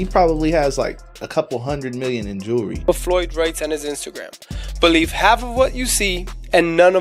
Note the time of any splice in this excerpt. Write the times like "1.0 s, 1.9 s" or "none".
2.9 s